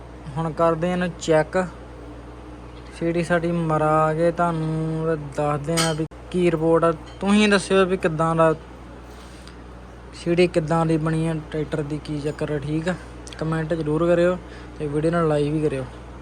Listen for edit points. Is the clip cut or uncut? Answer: uncut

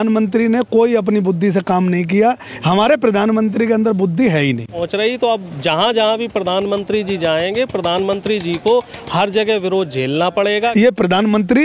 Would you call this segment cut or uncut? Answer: cut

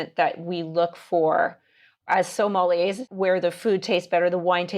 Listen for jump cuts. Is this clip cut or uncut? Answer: cut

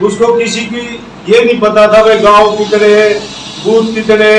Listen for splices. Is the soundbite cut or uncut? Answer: uncut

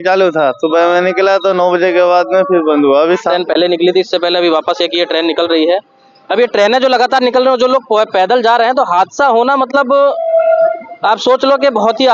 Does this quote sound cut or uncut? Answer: cut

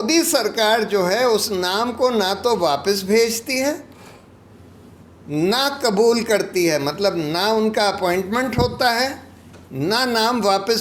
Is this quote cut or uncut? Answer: uncut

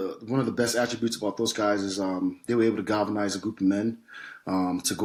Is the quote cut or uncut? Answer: uncut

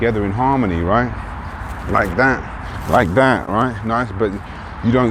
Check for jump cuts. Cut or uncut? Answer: uncut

